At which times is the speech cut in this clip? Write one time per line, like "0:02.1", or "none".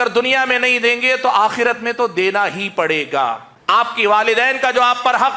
0:03.5

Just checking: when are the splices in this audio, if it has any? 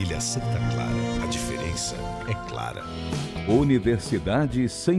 0:02.7

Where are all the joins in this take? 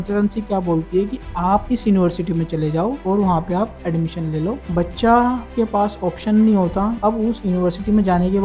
0:04.6
0:07.0

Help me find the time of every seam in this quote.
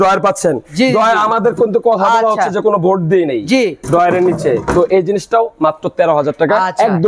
none

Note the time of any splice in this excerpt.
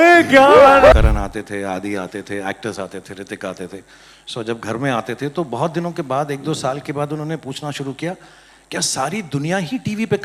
0:00.9

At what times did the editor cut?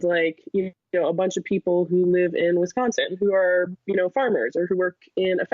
none

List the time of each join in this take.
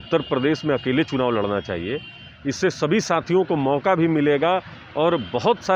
none

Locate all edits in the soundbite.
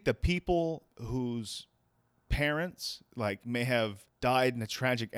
0:00.9

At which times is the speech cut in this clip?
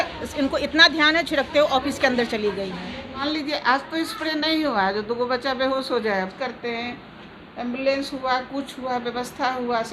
0:03.2
0:06.3

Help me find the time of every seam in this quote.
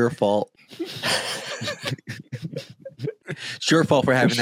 0:01.0
0:03.5

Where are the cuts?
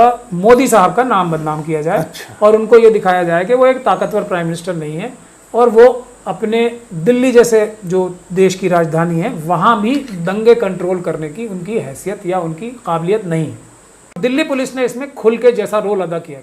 0:14.2

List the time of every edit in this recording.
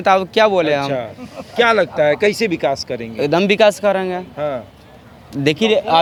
none

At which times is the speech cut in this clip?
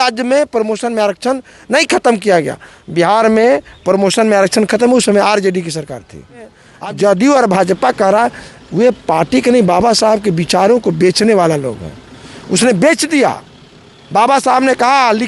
0:06.7

